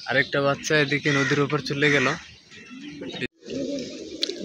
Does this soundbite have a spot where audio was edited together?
yes; 1 cut; at 3.3 s

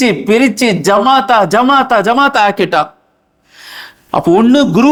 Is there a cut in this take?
no; 0 cuts

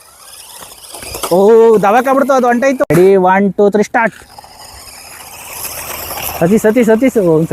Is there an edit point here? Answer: yes; 1 cut; at 2.8 s

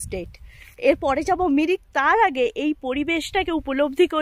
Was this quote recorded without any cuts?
yes; 0 cuts

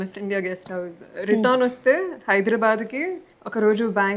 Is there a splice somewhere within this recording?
no; 0 cuts

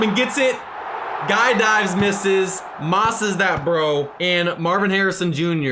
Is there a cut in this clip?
yes; 1 cut; at 4.1 s

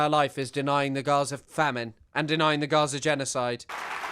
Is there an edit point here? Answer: yes; 1 cut; at 1.7 s

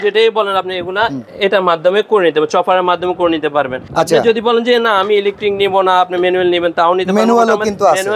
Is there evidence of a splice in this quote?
yes; 2 cuts; at 1.2 s, 3.8 s

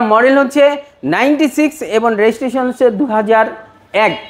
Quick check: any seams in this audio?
no; 0 cuts

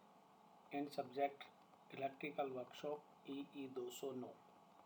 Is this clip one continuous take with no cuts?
yes; 0 cuts

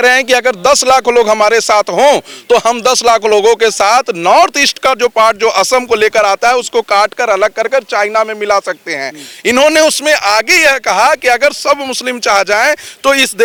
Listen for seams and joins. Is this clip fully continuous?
yes; 0 cuts

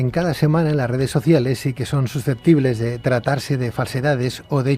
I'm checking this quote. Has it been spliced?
yes; 1 cut; at 3.0 s

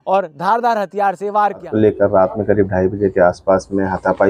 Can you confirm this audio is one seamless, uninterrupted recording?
no; 1 cut; at 1.7 s

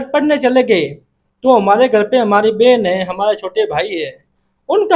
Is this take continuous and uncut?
yes; 0 cuts

